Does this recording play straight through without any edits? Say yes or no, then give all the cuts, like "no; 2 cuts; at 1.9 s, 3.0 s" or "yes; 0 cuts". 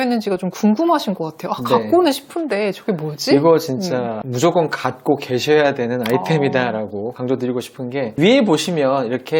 yes; 0 cuts